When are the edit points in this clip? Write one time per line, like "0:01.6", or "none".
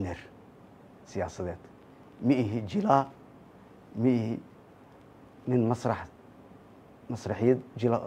0:01.3